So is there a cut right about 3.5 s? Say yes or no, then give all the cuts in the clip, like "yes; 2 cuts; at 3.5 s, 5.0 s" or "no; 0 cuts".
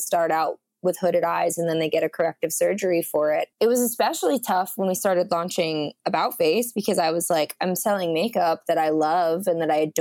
yes; 1 cut; at 3.5 s